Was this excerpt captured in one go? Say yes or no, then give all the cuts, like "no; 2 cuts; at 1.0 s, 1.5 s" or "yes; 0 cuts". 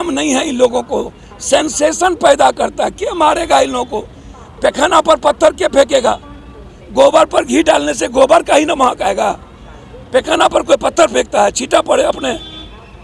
yes; 0 cuts